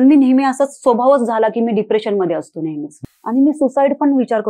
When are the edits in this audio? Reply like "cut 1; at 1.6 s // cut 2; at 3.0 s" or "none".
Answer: cut 1; at 3.0 s